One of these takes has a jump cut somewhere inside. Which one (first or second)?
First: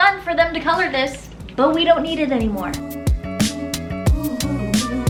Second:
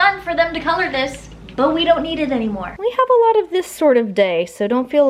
second